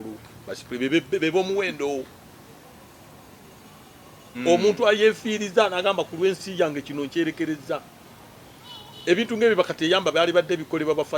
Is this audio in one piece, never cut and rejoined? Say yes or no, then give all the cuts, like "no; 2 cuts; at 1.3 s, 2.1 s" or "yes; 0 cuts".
yes; 0 cuts